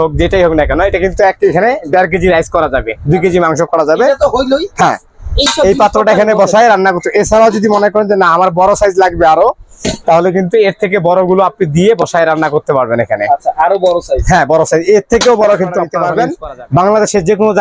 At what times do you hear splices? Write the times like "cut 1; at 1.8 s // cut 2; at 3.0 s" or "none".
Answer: cut 1; at 16.0 s

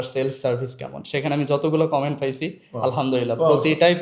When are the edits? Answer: none

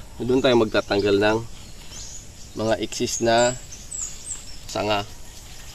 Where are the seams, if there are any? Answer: cut 1; at 4.7 s

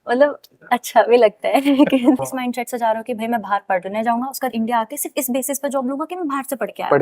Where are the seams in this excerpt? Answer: cut 1; at 2.2 s

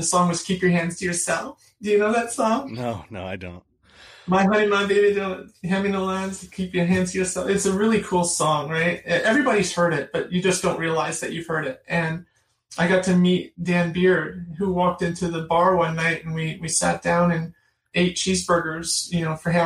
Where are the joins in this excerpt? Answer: cut 1; at 17.9 s

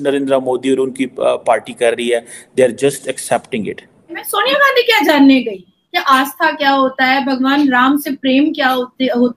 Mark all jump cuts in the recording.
cut 1; at 4.2 s

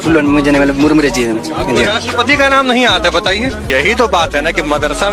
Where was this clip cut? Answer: cut 1; at 3.7 s

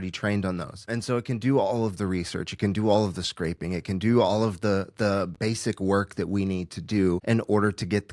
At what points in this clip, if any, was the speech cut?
cut 1; at 0.9 s // cut 2; at 7.2 s

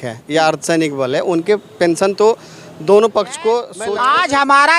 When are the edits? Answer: cut 1; at 3.7 s

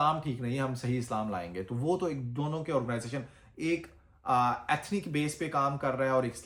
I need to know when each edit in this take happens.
none

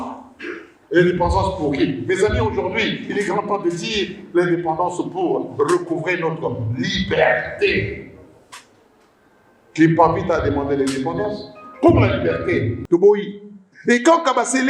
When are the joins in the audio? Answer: cut 1; at 12.8 s

